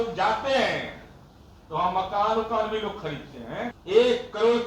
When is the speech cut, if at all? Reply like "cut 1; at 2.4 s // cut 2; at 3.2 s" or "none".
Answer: cut 1; at 3.8 s